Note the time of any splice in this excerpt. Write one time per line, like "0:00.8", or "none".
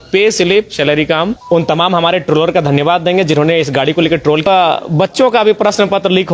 0:01.4
0:04.5